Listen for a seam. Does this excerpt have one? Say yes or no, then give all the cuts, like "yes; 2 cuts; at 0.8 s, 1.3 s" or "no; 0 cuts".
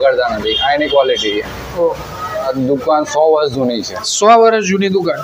yes; 1 cut; at 2.5 s